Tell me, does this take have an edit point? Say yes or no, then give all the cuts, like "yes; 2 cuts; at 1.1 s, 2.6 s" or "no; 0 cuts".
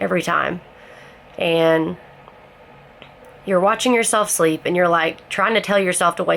no; 0 cuts